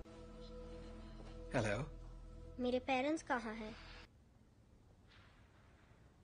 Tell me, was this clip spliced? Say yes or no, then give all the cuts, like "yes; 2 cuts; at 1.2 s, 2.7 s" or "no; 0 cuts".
yes; 1 cut; at 4.1 s